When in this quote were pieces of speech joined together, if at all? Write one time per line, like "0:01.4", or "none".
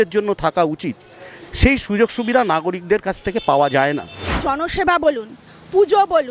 0:04.4